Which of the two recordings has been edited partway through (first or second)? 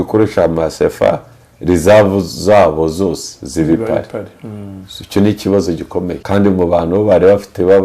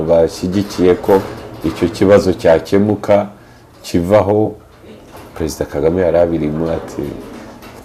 first